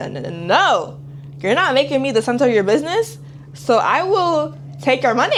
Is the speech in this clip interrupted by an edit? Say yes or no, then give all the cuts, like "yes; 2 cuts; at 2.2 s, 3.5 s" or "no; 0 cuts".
no; 0 cuts